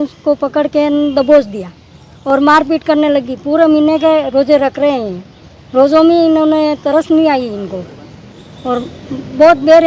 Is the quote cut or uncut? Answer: uncut